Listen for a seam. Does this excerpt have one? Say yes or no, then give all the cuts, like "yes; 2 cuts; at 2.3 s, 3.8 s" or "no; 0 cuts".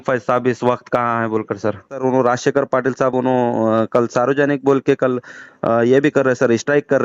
yes; 1 cut; at 2.0 s